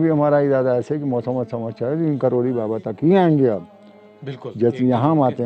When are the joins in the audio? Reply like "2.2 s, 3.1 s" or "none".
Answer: none